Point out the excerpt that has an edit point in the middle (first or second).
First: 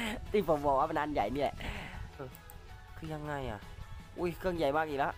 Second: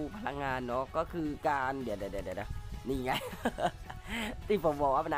first